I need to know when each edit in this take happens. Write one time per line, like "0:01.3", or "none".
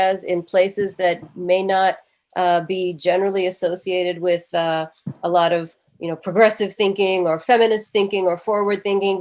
0:01.3